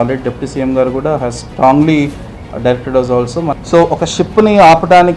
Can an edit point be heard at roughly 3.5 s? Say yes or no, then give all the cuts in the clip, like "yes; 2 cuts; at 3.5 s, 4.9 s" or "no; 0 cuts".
yes; 1 cut; at 3.5 s